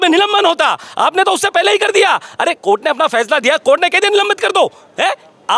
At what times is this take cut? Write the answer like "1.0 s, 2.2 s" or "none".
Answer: none